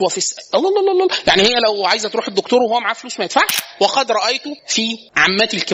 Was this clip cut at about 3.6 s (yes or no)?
yes